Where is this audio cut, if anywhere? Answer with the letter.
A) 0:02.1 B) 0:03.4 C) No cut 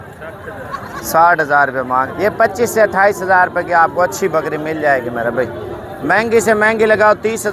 A